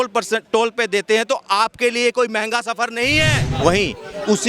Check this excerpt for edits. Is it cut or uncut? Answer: cut